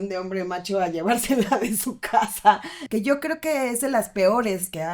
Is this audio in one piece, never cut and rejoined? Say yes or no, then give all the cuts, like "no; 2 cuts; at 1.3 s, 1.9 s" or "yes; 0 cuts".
no; 1 cut; at 2.7 s